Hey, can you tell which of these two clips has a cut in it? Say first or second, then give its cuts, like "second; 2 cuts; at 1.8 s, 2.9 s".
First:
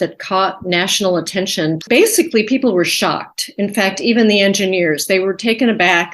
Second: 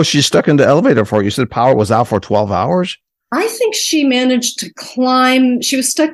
first; 1 cut; at 1.8 s